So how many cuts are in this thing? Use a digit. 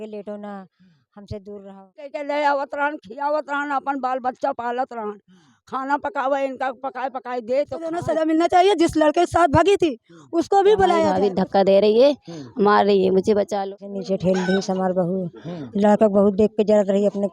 4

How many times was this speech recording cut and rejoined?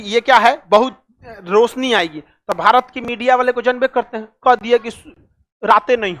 0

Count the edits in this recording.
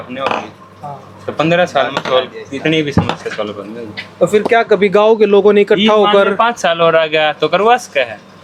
0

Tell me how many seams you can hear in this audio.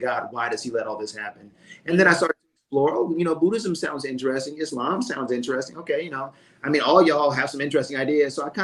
0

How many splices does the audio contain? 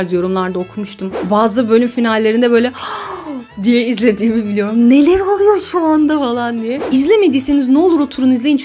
2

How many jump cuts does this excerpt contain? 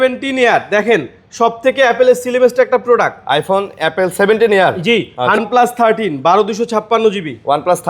1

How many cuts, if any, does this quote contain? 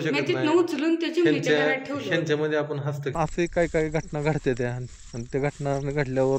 1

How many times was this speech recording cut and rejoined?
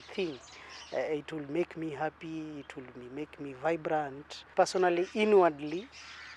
1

